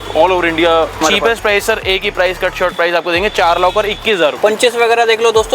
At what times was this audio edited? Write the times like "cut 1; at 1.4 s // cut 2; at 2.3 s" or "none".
cut 1; at 1.0 s // cut 2; at 4.4 s